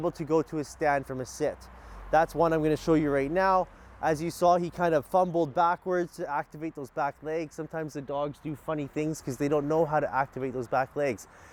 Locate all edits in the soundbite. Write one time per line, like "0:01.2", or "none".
none